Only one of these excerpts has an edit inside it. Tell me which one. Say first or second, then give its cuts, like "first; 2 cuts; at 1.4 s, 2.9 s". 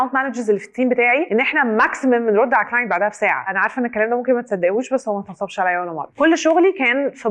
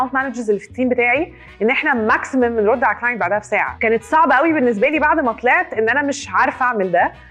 first; 3 cuts; at 1.3 s, 3.4 s, 6.0 s